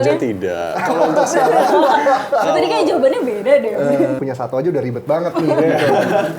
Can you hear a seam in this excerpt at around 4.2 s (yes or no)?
yes